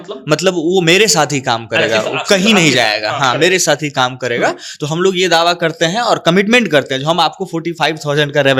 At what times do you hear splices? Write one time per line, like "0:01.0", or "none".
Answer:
none